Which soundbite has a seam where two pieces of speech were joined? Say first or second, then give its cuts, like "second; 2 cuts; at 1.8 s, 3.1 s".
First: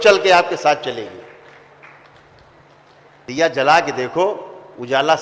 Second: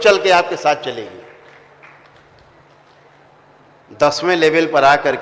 second; 1 cut; at 3.3 s